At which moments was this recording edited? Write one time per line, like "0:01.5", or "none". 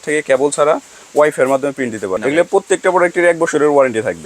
0:02.1